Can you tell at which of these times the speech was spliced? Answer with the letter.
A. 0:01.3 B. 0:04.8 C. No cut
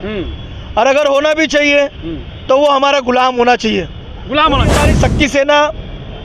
B